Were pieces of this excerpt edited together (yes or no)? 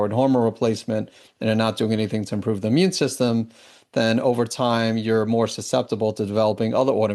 no